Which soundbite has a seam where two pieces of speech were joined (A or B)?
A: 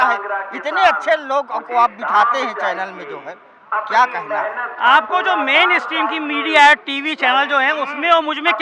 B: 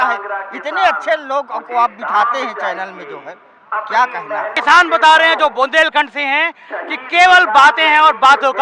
B